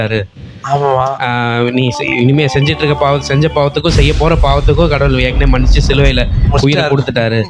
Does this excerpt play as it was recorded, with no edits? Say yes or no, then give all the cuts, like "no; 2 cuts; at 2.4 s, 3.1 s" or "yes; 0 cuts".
yes; 0 cuts